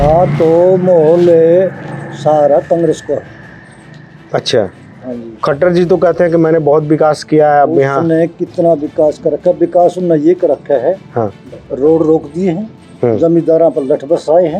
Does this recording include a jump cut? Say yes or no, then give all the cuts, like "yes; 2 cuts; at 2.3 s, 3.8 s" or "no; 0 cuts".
no; 0 cuts